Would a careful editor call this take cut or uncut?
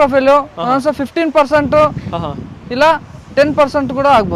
uncut